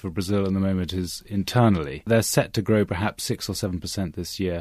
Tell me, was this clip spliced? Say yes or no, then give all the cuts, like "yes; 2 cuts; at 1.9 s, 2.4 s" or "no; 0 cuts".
yes; 1 cut; at 2.1 s